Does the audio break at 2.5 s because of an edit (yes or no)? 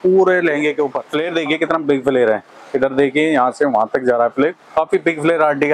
no